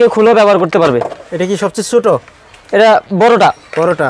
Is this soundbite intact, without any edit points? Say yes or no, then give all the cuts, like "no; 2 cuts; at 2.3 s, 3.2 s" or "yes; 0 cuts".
yes; 0 cuts